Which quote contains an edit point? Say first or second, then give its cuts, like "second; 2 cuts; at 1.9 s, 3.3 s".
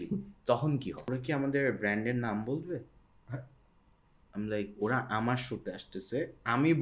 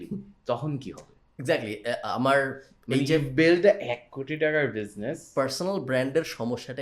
first; 1 cut; at 1.0 s